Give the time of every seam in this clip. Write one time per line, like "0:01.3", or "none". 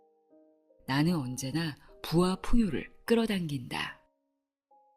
0:00.8
0:03.9